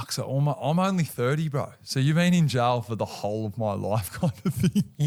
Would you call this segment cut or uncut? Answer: uncut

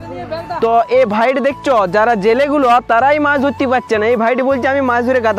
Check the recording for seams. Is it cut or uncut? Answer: uncut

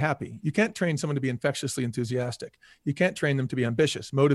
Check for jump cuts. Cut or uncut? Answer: uncut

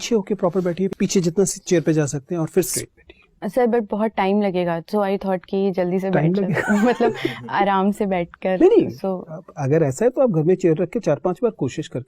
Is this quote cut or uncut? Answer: cut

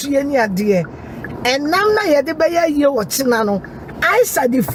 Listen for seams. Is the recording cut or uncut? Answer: uncut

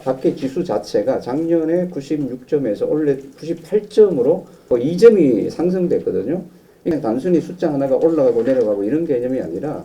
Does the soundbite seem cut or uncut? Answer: cut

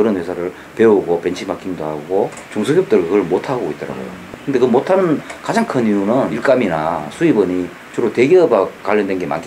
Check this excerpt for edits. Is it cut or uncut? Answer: cut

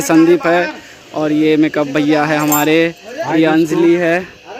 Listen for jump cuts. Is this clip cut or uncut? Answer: uncut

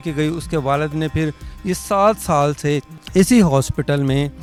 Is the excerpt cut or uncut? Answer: uncut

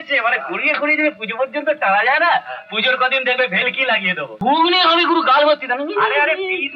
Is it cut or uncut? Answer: cut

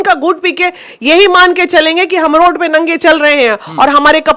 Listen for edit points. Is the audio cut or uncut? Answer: uncut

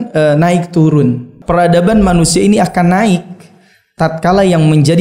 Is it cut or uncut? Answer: cut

